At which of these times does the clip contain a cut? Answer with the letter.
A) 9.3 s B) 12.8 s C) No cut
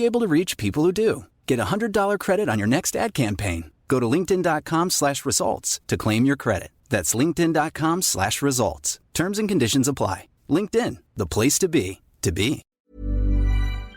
B